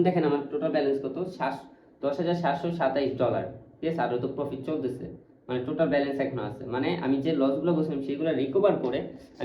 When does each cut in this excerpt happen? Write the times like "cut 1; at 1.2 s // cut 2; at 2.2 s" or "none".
none